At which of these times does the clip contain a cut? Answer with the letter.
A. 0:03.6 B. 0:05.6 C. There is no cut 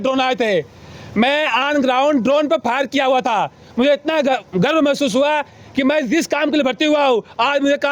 C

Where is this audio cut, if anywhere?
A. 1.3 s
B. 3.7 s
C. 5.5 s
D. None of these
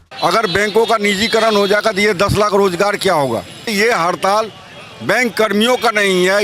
B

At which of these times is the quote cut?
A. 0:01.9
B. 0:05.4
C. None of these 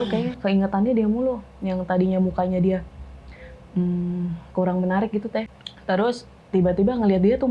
B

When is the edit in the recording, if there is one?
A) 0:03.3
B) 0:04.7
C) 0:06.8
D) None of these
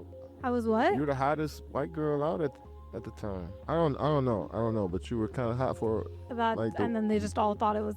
C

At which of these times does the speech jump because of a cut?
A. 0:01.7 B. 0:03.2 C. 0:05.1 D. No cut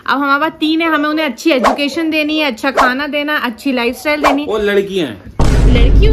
D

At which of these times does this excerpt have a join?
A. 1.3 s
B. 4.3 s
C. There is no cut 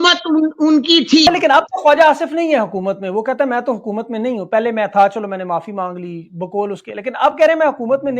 A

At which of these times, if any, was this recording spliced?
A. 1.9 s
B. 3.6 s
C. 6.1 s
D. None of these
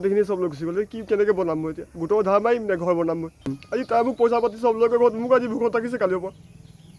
B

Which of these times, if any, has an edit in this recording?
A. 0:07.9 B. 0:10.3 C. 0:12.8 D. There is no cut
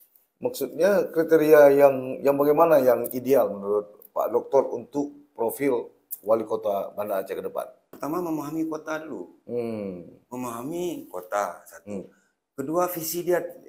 A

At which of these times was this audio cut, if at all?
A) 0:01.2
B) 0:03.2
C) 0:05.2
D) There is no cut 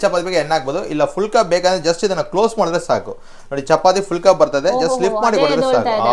D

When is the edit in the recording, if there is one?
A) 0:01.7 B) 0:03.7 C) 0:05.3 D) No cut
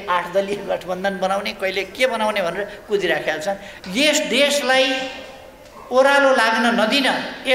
B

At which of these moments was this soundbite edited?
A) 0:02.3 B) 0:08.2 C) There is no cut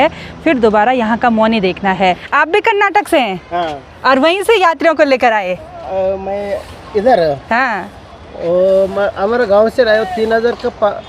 A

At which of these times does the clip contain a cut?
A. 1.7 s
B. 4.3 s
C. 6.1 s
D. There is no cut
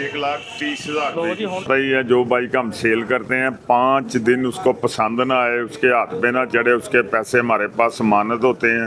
A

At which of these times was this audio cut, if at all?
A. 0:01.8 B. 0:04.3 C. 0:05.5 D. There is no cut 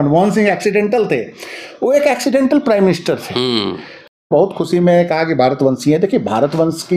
B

